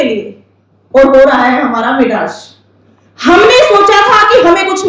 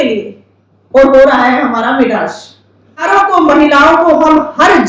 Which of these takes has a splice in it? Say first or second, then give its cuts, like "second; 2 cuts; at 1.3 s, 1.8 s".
second; 1 cut; at 3.1 s